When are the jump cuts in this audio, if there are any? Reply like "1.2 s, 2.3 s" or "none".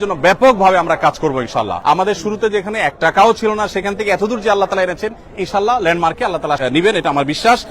1.7 s, 6.6 s